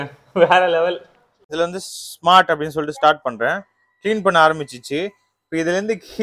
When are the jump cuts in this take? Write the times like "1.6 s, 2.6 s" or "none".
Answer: 1.4 s